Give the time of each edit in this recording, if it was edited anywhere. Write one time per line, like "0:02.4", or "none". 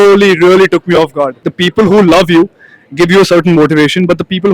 0:01.4